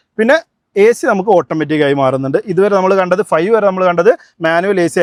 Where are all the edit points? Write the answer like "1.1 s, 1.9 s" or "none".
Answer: none